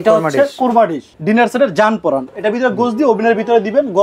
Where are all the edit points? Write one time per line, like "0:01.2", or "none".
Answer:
0:01.1
0:02.3